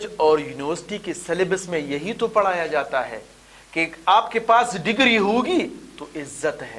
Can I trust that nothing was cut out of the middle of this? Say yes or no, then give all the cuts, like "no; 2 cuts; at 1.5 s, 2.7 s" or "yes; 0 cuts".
yes; 0 cuts